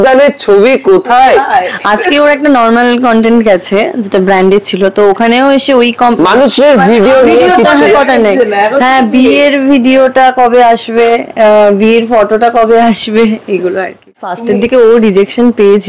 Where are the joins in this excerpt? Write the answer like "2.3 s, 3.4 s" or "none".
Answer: 14.3 s